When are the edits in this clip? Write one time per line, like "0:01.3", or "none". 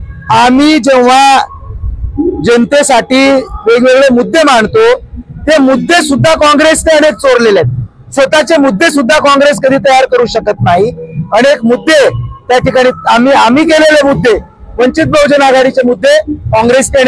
none